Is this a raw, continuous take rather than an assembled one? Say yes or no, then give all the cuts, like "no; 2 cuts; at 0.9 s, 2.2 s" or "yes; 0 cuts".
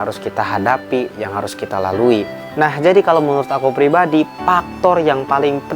no; 1 cut; at 2.4 s